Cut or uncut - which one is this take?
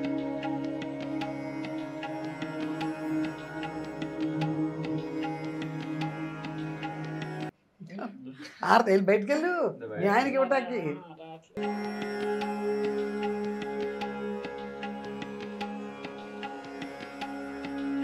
uncut